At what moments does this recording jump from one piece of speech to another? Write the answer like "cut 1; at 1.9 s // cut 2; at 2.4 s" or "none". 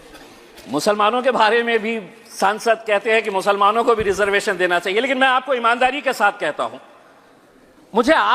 none

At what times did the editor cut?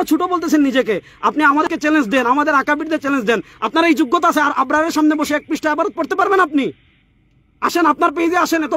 cut 1; at 1.7 s

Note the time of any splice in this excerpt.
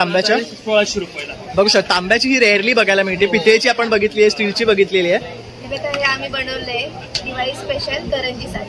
cut 1; at 5.4 s

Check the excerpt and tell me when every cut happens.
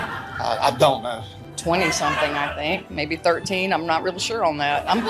cut 1; at 1.2 s

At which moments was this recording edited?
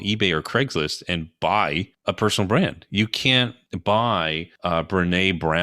cut 1; at 1.7 s // cut 2; at 3.6 s // cut 3; at 4.5 s

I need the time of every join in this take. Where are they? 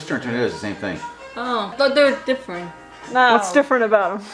cut 1; at 1.7 s

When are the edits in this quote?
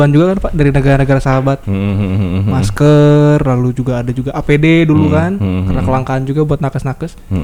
none

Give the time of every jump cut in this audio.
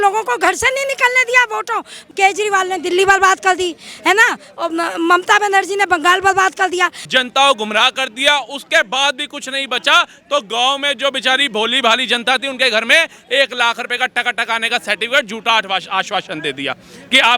cut 1; at 2.0 s // cut 2; at 7.0 s

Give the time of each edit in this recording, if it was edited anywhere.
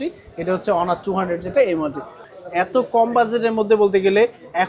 cut 1; at 2.2 s

